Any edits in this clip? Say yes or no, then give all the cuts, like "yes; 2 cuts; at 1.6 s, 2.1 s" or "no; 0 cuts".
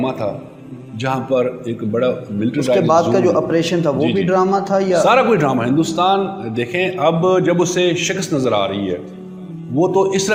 no; 0 cuts